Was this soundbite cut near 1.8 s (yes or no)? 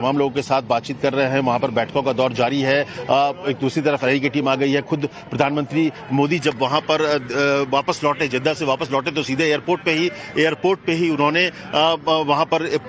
no